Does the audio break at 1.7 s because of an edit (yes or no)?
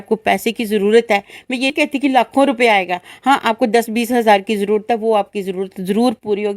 yes